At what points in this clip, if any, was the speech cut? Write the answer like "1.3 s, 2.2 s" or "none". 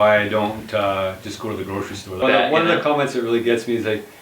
2.2 s